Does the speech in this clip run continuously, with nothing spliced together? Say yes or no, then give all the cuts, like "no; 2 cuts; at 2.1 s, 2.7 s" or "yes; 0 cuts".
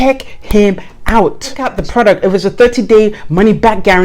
no; 1 cut; at 1.7 s